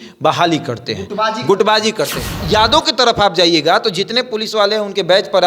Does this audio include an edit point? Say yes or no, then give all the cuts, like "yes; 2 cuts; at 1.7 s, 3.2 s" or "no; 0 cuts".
yes; 1 cut; at 2.4 s